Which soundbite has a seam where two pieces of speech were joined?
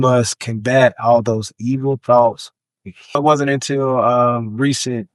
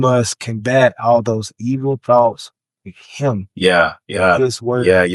first; 1 cut; at 3.2 s

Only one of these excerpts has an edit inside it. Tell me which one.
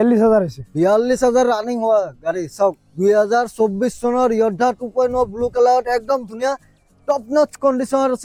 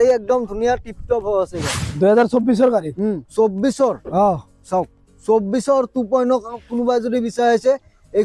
second; 1 cut; at 1.9 s

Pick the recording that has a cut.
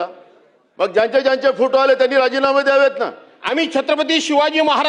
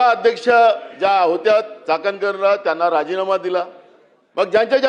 first; 1 cut; at 3.3 s

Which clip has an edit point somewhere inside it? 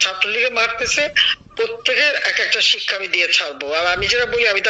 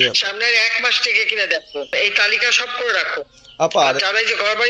second; 1 cut; at 1.9 s

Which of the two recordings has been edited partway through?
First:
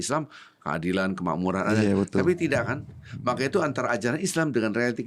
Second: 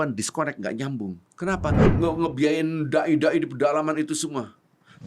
second; 1 cut; at 1.8 s

